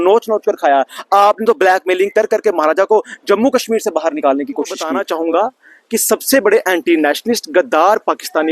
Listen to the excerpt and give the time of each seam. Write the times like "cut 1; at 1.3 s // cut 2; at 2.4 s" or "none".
cut 1; at 4.9 s

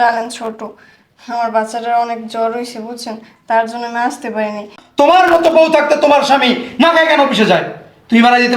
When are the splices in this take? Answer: cut 1; at 4.8 s

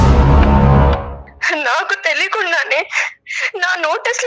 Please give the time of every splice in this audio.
cut 1; at 1.2 s

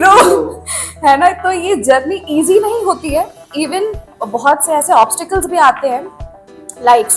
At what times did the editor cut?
none

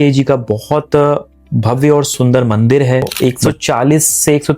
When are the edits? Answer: cut 1; at 2.1 s // cut 2; at 3.1 s

